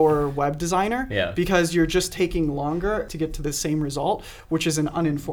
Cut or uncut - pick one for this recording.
cut